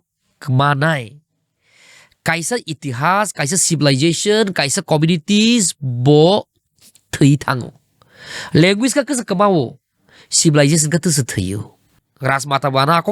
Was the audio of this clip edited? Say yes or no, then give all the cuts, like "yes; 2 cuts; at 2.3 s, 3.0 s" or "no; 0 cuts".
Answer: yes; 1 cut; at 11.9 s